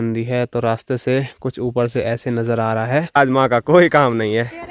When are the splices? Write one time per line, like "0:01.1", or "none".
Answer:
0:03.2